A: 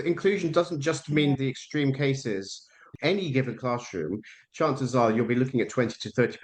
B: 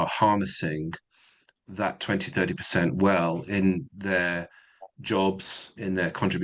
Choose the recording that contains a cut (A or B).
A